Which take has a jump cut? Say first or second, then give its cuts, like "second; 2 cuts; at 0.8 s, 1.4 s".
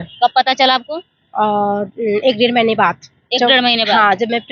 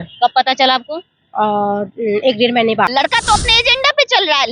second; 1 cut; at 2.9 s